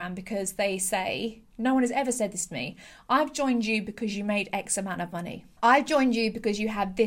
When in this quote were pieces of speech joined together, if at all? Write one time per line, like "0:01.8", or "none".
0:05.4

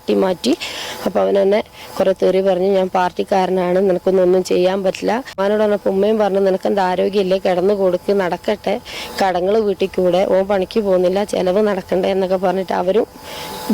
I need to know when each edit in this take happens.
0:05.4

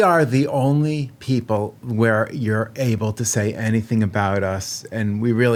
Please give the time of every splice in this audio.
none

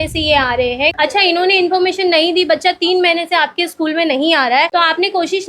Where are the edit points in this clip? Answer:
0:00.9

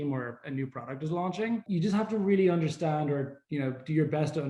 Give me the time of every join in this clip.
0:01.6

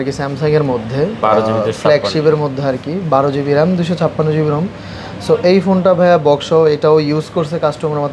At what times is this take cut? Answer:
none

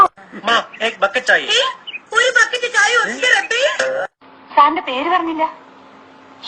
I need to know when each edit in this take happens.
0:02.6

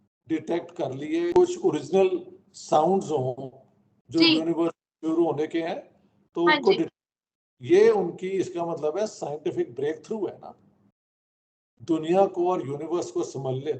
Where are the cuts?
none

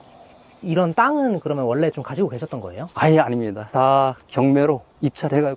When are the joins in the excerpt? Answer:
0:03.6

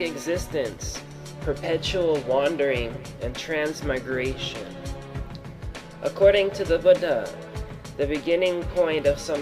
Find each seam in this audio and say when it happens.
0:04.6

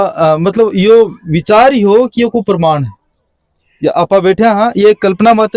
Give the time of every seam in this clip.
none

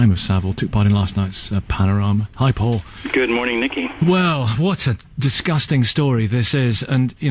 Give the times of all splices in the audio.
0:04.5

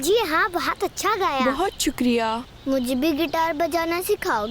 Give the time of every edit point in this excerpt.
0:01.4

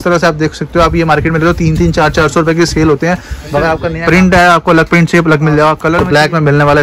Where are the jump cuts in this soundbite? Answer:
0:03.9
0:05.9

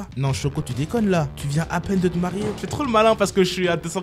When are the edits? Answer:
0:02.6

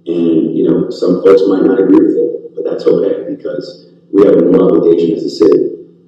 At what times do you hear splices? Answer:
none

